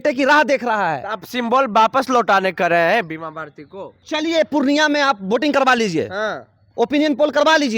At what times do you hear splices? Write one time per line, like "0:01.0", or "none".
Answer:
0:04.0